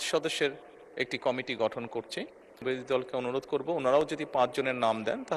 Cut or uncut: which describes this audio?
cut